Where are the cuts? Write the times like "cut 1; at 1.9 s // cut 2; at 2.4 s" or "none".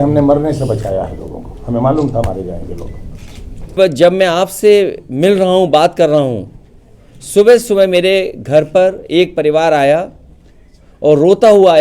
cut 1; at 3.7 s